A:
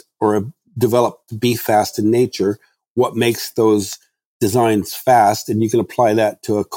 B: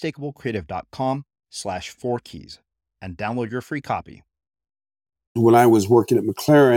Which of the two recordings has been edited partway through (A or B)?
B